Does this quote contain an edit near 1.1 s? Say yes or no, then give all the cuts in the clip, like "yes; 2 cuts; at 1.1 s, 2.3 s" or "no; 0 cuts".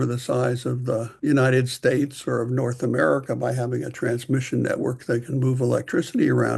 yes; 1 cut; at 1.1 s